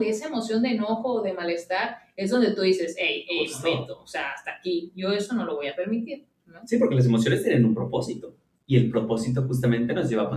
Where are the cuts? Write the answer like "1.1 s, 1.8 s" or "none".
none